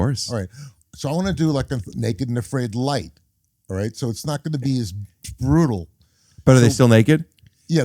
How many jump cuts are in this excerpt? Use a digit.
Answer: 0